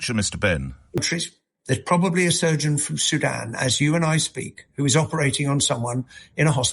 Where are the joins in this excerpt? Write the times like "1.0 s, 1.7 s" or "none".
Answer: 1.0 s